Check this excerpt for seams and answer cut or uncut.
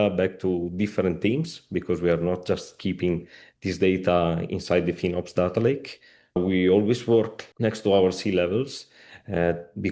cut